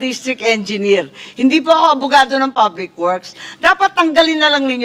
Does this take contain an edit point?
no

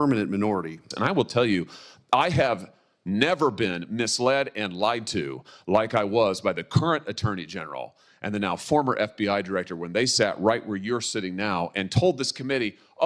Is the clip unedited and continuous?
no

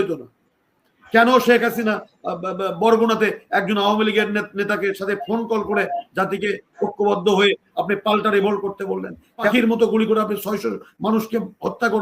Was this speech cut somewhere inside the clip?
yes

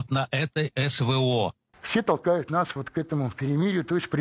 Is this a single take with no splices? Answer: no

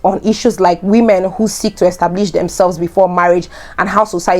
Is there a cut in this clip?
no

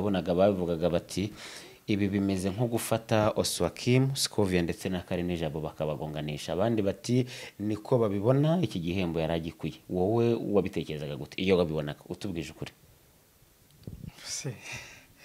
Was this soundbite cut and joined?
no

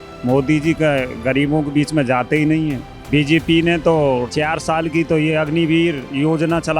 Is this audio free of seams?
no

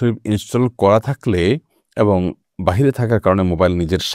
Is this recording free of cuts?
yes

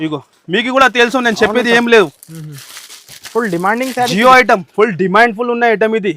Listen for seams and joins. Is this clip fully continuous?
yes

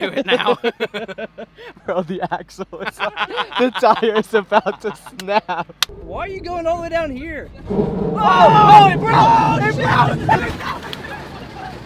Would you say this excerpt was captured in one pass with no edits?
no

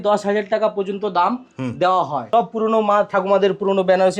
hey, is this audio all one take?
no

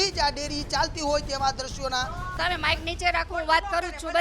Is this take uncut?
no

